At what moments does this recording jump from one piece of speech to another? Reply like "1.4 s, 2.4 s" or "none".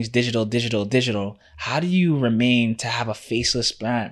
none